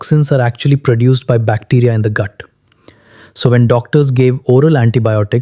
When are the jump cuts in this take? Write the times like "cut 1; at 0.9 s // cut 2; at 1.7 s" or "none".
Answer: none